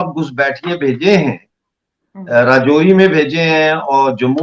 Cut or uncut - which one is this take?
uncut